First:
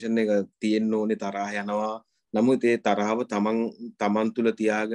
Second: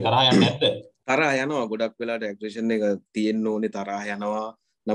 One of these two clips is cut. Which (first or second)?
second